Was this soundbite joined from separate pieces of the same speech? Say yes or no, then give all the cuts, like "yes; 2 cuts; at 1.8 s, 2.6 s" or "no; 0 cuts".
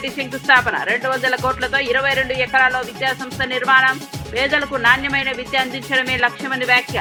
no; 0 cuts